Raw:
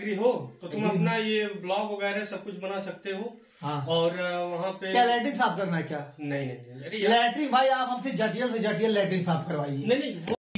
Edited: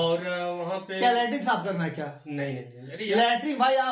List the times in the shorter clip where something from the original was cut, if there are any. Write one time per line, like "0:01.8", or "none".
none